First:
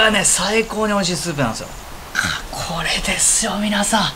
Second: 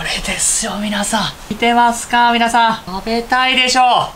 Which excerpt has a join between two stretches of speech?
first; 1 cut; at 1.7 s

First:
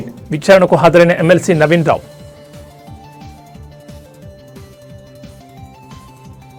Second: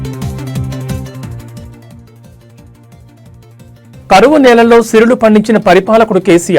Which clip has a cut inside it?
second; 1 cut; at 3.6 s

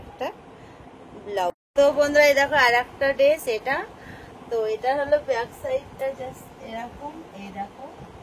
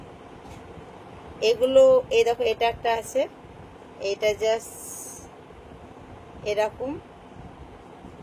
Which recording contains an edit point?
first; 1 cut; at 1.5 s

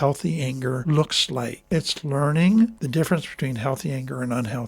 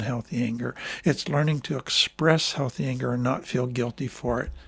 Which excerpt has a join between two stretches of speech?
first; 3 cuts; at 0.8 s, 1.7 s, 2.8 s

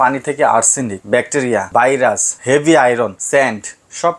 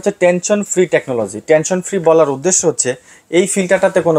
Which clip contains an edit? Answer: first; 3 cuts; at 1.0 s, 2.0 s, 3.2 s

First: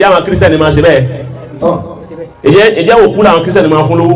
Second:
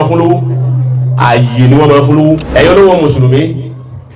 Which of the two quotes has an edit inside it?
second; 1 cut; at 2.5 s

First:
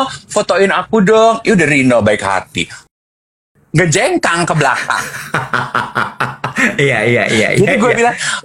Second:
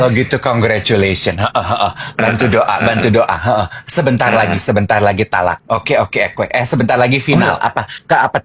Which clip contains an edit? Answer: first; 1 cut; at 3.2 s

